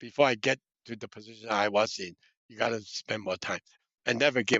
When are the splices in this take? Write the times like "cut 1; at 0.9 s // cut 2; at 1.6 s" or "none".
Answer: cut 1; at 3.7 s